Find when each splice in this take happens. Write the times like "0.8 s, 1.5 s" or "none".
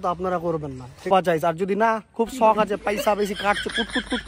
1.1 s